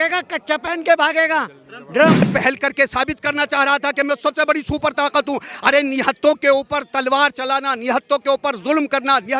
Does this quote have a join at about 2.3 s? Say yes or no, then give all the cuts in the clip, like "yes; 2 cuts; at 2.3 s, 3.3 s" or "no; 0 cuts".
yes; 1 cut; at 2.3 s